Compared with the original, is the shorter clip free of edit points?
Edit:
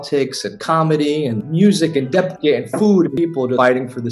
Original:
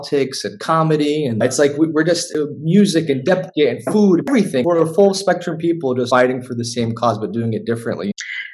no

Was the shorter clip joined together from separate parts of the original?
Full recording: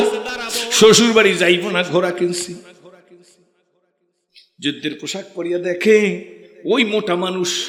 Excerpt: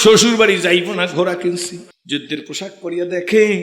yes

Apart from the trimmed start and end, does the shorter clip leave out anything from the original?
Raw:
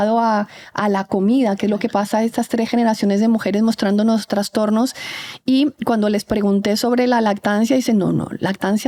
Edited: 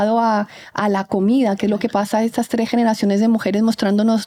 no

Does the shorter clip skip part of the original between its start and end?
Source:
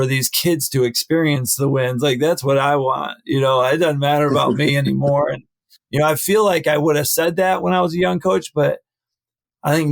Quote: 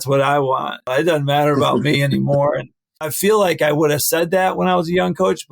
yes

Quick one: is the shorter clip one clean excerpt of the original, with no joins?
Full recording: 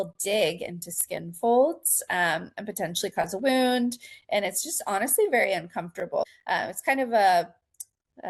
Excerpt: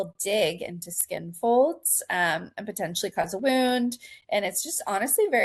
yes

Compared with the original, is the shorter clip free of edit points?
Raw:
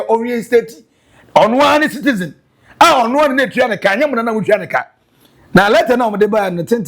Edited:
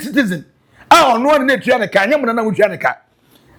yes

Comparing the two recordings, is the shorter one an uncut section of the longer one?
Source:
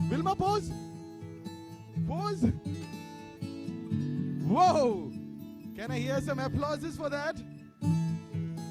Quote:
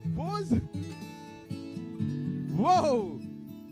yes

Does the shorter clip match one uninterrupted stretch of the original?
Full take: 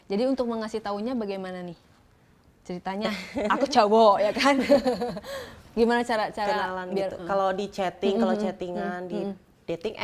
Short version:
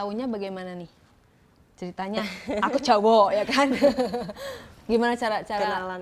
yes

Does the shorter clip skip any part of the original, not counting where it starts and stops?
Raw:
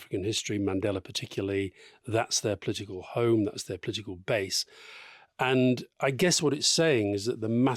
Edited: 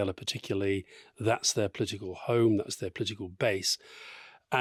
no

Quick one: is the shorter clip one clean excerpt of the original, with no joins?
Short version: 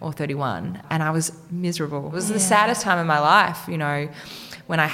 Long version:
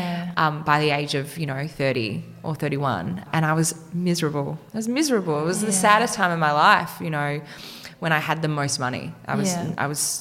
no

